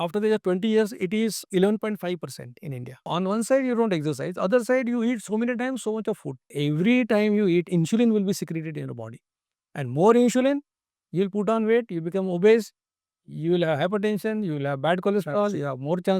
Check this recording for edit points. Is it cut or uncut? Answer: cut